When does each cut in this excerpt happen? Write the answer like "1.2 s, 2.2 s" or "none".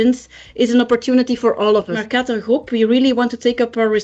2.0 s

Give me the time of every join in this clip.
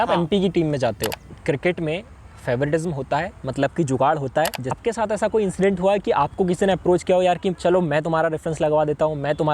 1.3 s, 4.8 s

